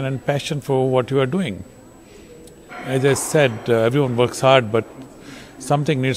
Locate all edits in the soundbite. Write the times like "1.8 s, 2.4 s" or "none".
none